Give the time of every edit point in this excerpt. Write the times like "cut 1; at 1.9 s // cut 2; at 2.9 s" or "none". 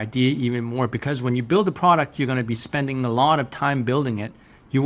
none